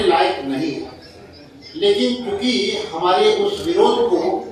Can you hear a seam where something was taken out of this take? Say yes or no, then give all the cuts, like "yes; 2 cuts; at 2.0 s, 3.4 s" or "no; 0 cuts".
no; 0 cuts